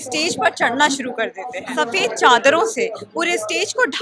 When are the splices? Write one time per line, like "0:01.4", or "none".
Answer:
0:01.6